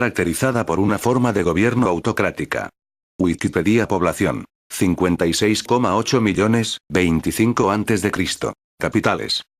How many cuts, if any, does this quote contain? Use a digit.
0